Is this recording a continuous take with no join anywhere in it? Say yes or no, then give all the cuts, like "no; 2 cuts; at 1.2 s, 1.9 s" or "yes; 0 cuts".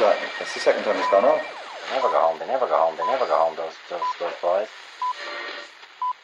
yes; 0 cuts